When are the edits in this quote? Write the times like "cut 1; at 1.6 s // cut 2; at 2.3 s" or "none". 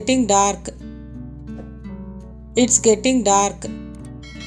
cut 1; at 0.8 s // cut 2; at 2.1 s // cut 3; at 3.7 s